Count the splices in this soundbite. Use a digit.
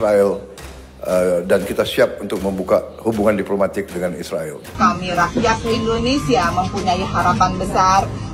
1